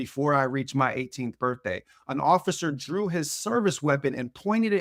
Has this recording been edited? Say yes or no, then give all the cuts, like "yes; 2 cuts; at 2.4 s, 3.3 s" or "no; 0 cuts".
no; 0 cuts